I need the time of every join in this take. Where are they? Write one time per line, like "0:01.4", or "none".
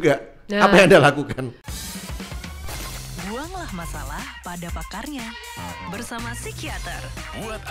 0:01.6